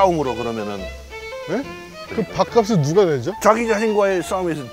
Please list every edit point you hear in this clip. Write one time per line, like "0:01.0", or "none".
0:02.0
0:03.3